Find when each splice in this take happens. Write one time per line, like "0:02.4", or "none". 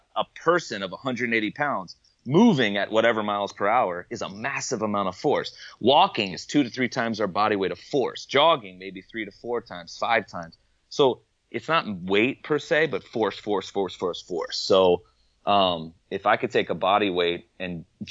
none